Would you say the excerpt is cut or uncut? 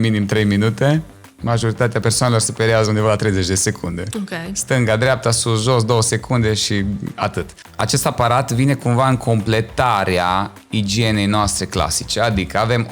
cut